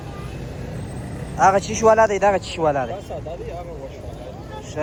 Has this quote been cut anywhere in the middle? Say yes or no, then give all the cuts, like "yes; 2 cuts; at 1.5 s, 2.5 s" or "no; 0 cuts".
no; 0 cuts